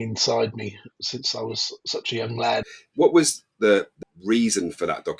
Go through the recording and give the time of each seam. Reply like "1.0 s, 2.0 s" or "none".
2.8 s, 3.9 s